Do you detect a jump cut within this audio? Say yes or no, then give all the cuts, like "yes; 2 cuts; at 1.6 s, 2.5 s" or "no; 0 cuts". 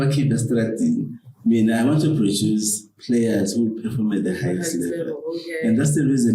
no; 0 cuts